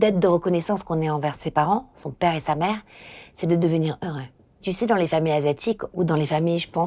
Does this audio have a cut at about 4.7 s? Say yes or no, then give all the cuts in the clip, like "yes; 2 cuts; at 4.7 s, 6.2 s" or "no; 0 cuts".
yes; 3 cuts; at 1.4 s, 4.7 s, 5.9 s